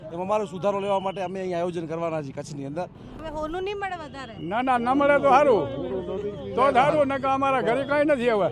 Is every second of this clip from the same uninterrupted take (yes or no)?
no